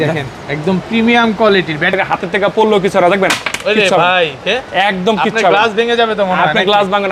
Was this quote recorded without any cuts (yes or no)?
no